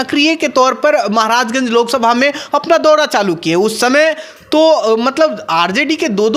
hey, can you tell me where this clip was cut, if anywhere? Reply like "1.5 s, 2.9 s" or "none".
none